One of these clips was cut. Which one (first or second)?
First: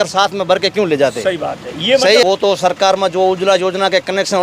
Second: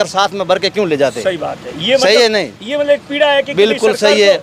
first